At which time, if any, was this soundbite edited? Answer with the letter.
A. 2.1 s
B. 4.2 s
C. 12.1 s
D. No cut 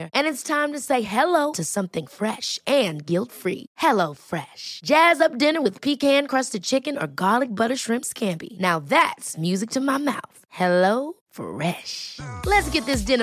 D